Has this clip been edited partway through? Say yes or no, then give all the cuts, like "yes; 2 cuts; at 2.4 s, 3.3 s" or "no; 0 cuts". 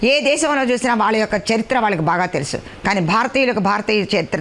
no; 0 cuts